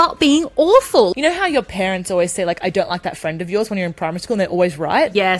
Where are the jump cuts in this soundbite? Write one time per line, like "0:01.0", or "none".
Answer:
0:01.1